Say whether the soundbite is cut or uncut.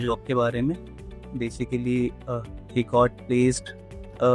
uncut